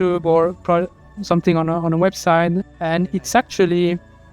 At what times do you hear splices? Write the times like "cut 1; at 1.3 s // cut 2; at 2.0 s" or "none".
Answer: cut 1; at 2.8 s